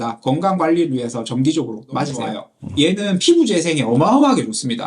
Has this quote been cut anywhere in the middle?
yes; 1 cut; at 2.4 s

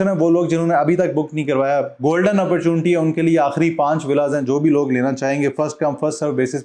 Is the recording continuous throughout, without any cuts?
yes; 0 cuts

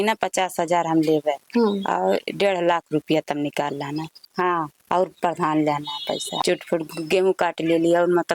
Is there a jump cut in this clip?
yes; 3 cuts; at 1.4 s, 4.3 s, 6.3 s

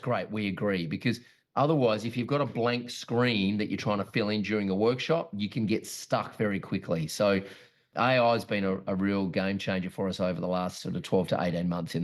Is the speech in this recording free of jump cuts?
no; 1 cut; at 7.9 s

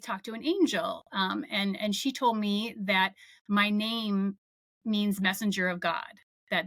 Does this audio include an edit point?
no; 0 cuts

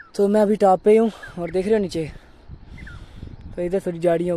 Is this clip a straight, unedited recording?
yes; 0 cuts

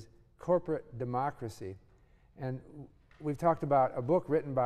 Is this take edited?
no; 0 cuts

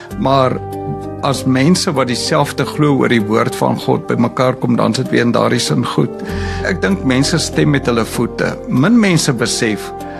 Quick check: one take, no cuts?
yes; 0 cuts

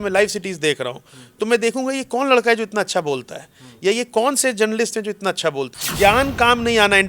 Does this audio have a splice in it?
yes; 1 cut; at 5.8 s

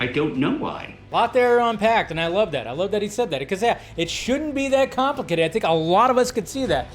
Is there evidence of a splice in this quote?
yes; 1 cut; at 1.0 s

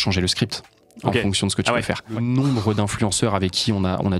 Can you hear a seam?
yes; 1 cut; at 2.1 s

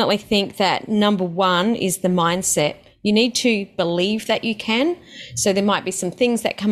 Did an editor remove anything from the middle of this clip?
no; 0 cuts

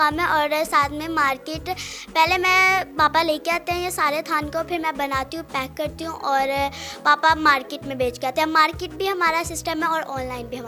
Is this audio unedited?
yes; 0 cuts

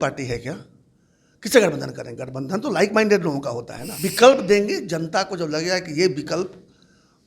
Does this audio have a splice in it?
yes; 1 cut; at 3.9 s

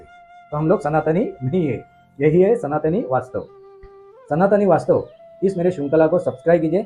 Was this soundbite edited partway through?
no; 0 cuts

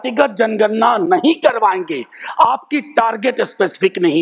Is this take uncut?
yes; 0 cuts

